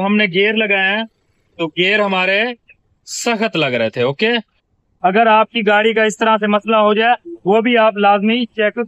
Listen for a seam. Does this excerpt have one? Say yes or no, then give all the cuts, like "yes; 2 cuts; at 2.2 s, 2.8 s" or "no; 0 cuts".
yes; 1 cut; at 4.9 s